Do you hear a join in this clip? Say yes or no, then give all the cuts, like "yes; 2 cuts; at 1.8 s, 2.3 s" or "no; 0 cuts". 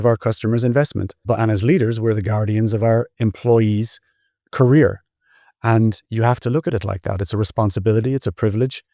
yes; 1 cut; at 1.2 s